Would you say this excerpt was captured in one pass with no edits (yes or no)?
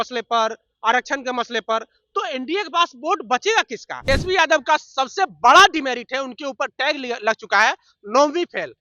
no